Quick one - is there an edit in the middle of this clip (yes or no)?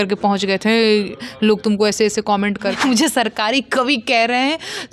yes